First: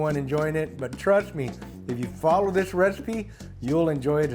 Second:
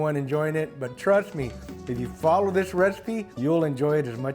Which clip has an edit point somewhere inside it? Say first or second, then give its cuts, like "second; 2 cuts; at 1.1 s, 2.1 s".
second; 1 cut; at 3.3 s